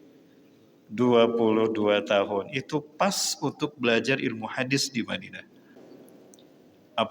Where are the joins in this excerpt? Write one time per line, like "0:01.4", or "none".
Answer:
0:05.8